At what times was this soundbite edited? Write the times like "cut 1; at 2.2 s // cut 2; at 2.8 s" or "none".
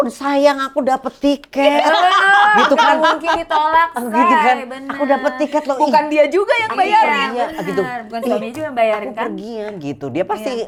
none